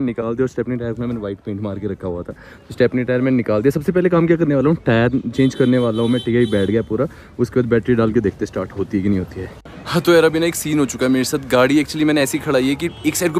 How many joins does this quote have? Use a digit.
0